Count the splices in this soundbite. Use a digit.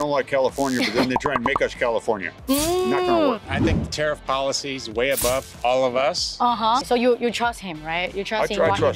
3